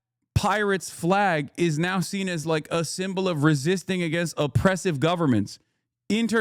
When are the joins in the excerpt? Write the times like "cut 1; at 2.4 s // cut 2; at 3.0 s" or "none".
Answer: none